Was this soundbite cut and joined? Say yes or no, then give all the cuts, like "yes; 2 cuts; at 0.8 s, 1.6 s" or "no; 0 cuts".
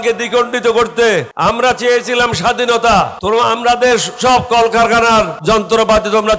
yes; 3 cuts; at 1.3 s, 3.2 s, 5.4 s